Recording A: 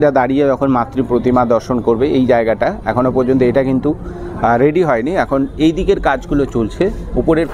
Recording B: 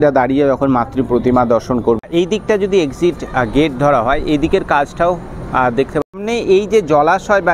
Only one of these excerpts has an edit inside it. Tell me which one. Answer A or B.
B